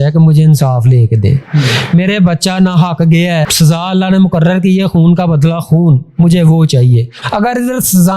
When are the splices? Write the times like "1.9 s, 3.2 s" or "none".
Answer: 3.5 s, 7.1 s